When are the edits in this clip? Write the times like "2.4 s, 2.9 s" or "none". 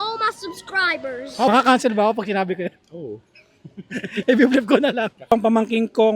1.5 s, 5.3 s

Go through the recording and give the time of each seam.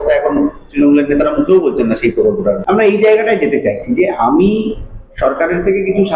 2.6 s

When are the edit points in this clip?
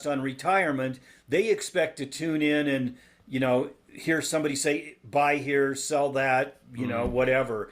none

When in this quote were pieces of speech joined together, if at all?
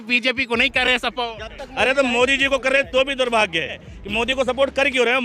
3.9 s

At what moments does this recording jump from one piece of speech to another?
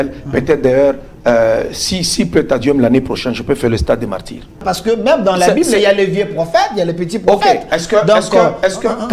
4.6 s

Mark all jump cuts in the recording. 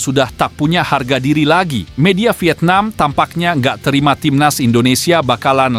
none

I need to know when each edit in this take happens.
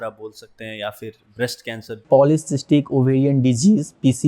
2.0 s

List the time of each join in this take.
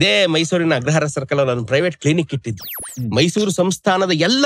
2.8 s

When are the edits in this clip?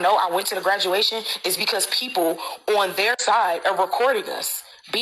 none

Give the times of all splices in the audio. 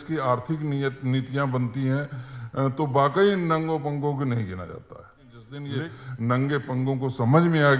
5.5 s

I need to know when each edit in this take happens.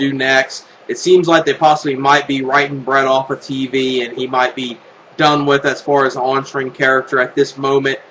none

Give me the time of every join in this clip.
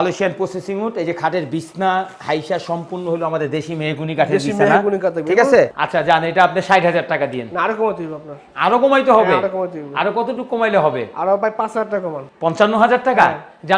5.8 s

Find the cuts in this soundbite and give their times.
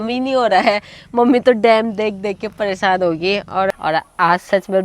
3.7 s

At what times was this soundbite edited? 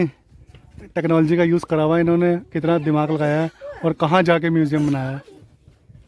none

